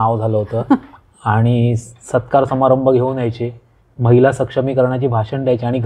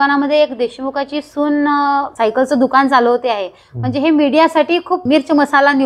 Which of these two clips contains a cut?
second; 2 cuts; at 2.1 s, 5.0 s

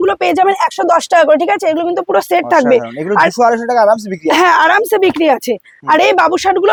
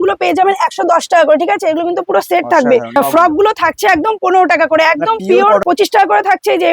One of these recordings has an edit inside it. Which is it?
second; 2 cuts; at 3.0 s, 5.6 s

